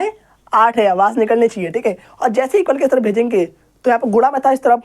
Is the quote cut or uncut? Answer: cut